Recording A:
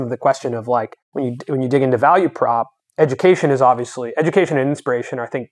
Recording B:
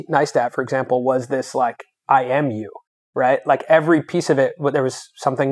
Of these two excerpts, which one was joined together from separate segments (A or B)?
A